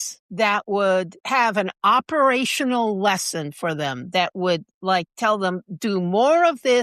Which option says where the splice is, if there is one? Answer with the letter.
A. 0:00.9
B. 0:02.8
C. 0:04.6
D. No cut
D